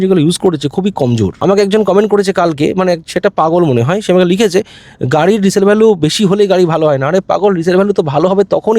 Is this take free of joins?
no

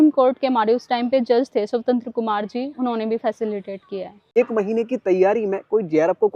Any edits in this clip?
yes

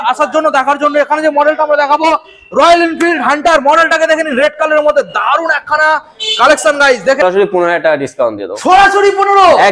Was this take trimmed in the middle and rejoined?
yes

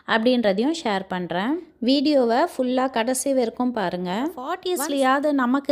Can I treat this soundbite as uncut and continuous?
no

